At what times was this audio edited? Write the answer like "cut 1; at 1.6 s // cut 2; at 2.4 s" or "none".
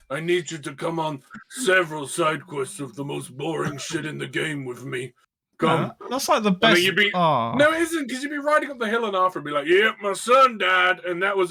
none